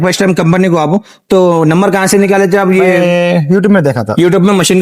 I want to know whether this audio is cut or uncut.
uncut